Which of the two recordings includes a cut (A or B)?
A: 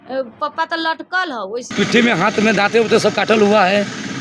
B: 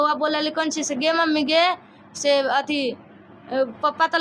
A